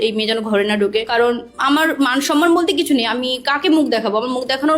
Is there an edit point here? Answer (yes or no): yes